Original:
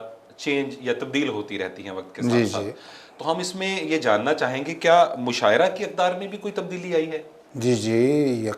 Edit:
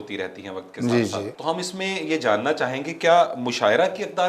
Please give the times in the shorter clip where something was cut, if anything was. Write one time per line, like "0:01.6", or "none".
0:01.3